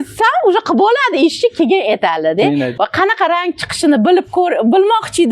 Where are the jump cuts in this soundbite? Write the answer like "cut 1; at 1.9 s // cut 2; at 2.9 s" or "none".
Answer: cut 1; at 2.7 s